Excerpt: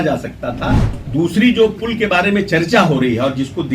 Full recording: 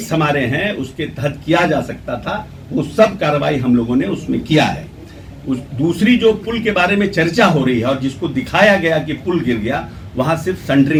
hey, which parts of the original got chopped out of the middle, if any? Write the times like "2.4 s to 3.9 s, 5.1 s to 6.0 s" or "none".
2.6 s to 5.6 s